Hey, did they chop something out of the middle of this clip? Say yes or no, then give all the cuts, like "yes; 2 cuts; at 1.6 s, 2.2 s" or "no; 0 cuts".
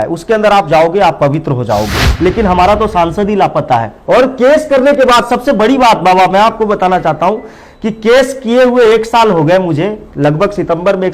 yes; 1 cut; at 2.0 s